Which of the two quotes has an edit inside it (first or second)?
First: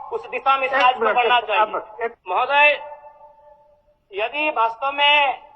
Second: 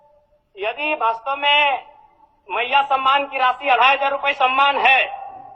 first